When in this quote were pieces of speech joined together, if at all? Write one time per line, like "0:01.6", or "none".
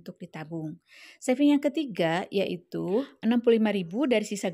0:03.1